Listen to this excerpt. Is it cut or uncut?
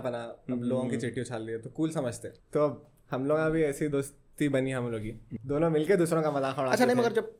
uncut